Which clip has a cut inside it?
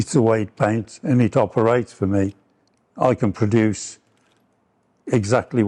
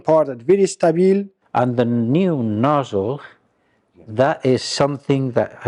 second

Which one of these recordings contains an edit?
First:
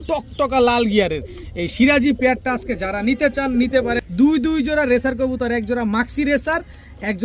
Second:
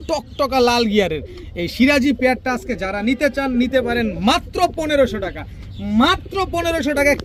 first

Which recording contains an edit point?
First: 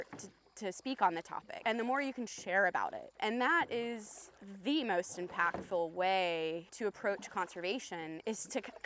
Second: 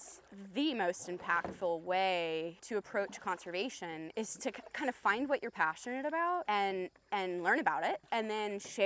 first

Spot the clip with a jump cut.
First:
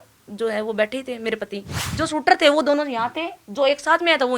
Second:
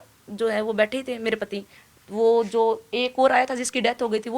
first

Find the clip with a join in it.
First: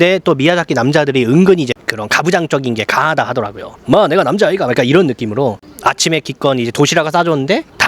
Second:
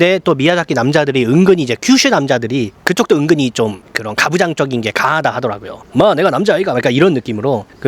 first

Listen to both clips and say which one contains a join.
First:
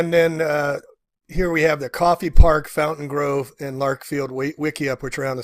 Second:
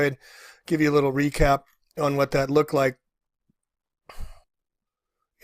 second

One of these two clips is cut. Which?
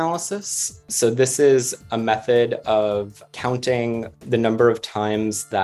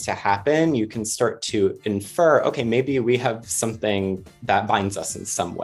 first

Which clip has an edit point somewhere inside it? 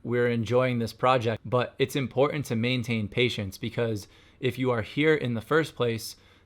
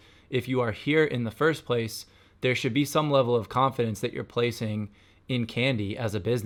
first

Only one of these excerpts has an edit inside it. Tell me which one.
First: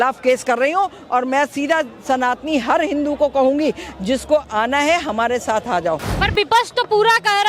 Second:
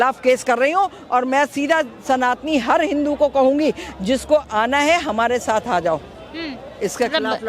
first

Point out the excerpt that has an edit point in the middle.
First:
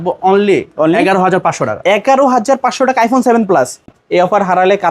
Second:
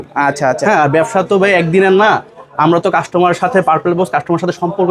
first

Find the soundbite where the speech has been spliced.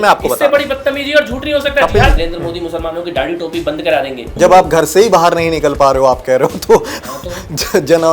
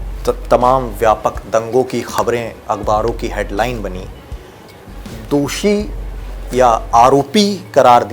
first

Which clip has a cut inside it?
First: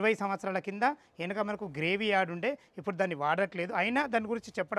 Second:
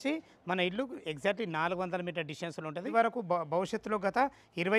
second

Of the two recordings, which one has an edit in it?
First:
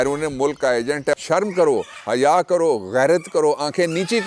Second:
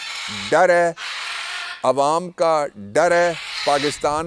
first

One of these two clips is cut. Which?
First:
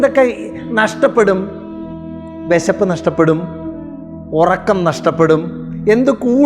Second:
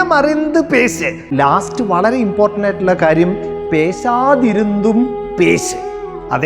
second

